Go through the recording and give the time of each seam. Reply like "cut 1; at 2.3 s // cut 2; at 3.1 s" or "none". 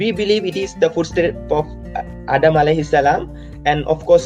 none